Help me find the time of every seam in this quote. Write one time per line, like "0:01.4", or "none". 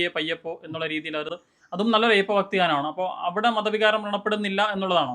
0:01.3